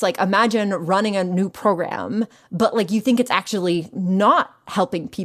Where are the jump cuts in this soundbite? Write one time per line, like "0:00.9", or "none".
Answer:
none